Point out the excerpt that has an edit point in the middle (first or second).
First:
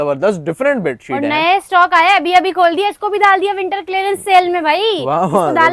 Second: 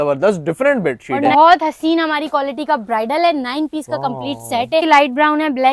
second